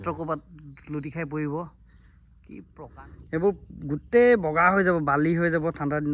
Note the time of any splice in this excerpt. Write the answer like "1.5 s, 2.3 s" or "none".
2.7 s